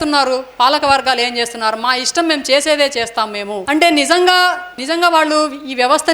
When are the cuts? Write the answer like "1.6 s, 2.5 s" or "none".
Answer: 3.6 s, 4.8 s